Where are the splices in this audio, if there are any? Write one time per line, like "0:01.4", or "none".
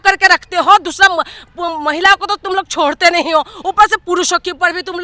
none